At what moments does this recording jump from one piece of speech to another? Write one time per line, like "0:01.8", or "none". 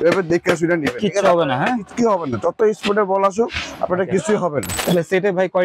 0:04.7